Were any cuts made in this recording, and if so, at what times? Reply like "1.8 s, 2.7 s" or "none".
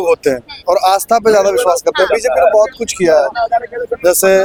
none